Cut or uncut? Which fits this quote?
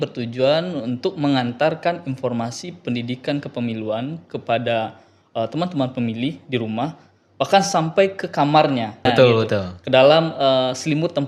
uncut